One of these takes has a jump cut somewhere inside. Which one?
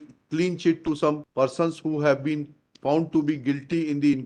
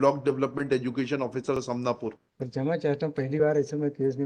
second; 1 cut; at 1.8 s

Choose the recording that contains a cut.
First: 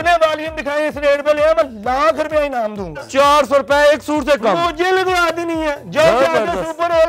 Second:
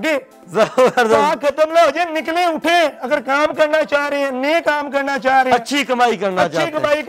first; 1 cut; at 3.1 s

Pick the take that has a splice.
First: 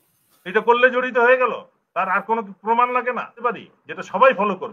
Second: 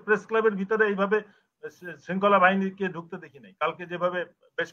first; 1 cut; at 3.3 s

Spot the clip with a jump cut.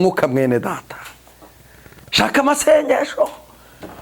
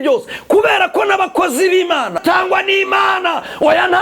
second; 1 cut; at 2.2 s

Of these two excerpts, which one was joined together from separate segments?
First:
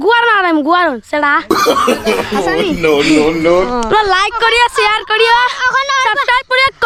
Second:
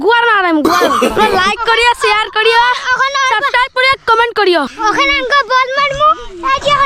second; 2 cuts; at 1.1 s, 4.7 s

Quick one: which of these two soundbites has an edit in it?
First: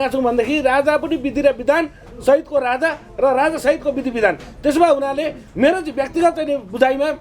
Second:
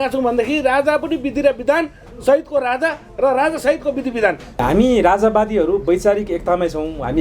second; 1 cut; at 4.6 s

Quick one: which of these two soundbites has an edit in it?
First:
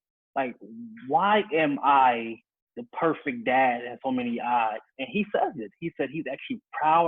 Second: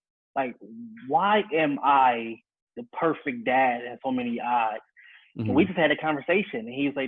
first; 1 cut; at 4.9 s

